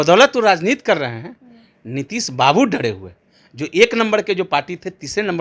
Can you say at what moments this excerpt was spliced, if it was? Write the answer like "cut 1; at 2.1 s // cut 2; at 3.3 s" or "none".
none